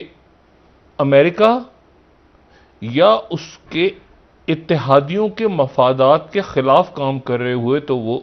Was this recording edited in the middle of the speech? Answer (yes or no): no